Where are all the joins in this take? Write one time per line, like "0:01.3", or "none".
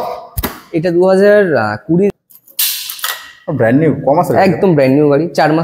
0:02.1